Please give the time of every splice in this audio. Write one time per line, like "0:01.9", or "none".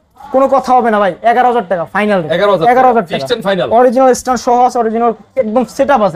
none